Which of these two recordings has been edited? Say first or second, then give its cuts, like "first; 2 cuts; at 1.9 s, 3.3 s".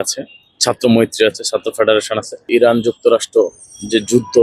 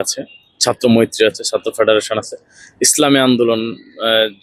first; 1 cut; at 2.5 s